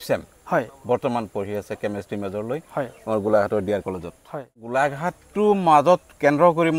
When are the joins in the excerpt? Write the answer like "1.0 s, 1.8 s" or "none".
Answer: 4.6 s